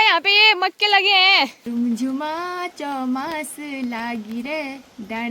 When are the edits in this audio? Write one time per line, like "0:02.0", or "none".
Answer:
0:01.6

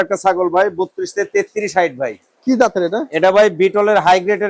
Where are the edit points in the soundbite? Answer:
none

